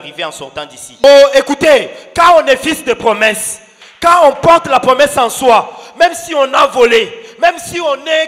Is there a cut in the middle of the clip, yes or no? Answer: yes